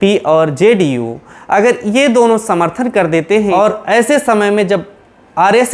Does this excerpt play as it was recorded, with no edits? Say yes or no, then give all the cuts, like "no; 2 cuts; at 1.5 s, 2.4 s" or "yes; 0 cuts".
no; 1 cut; at 3.5 s